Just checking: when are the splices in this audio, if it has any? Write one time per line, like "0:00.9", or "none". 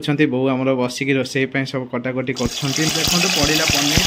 0:02.9